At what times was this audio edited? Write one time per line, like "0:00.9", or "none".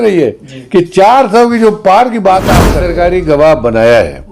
0:02.8